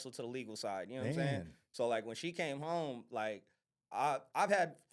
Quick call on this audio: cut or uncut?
uncut